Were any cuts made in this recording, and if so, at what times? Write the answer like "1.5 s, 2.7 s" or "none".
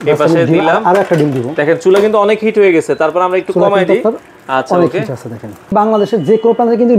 5.7 s

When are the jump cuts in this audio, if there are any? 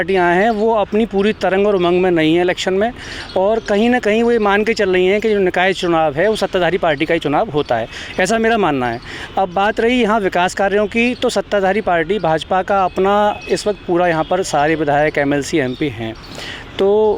none

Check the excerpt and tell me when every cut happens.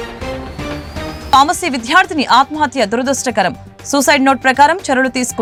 none

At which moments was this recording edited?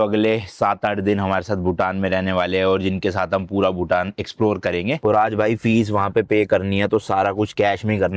5.0 s

